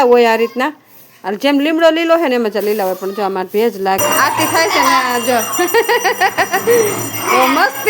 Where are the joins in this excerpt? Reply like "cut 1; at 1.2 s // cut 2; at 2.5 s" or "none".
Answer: cut 1; at 4.0 s